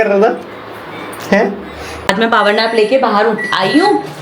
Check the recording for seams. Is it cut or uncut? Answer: cut